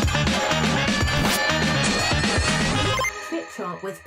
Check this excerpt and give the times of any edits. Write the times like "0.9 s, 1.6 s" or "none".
none